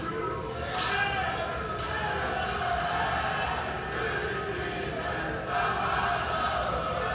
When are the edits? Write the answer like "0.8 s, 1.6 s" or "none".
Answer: none

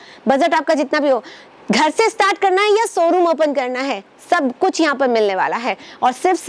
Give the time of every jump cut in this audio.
none

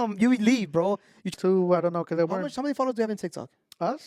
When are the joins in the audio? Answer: 1.3 s

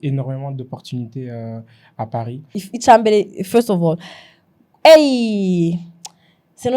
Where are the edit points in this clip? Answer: 2.6 s

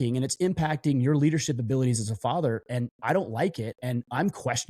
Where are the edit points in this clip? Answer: 3.7 s

